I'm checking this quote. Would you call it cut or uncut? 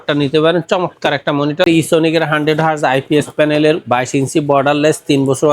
cut